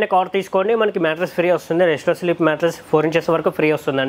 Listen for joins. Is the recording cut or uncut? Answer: uncut